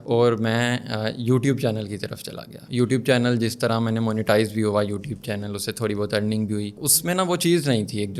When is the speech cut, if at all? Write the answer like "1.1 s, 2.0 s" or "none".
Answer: none